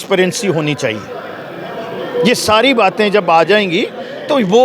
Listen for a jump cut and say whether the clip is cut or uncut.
uncut